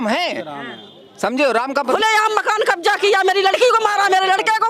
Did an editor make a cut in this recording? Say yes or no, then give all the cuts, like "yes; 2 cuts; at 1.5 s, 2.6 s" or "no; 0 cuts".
yes; 1 cut; at 1.9 s